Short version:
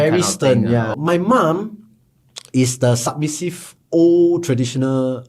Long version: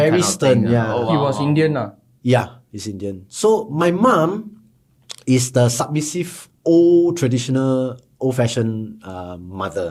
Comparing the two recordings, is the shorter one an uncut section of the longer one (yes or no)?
no